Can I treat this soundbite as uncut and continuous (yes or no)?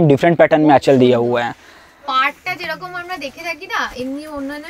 yes